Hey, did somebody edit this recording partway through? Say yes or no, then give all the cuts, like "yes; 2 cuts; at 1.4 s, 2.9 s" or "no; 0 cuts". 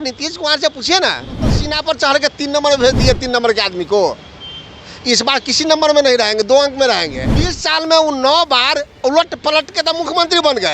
yes; 2 cuts; at 1.7 s, 7.6 s